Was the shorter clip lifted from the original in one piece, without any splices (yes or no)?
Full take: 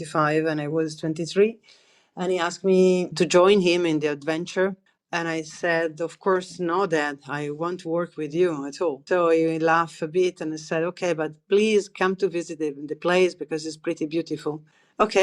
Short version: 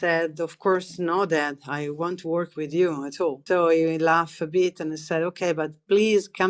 yes